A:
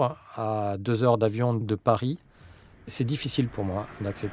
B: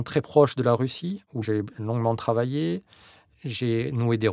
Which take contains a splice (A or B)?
B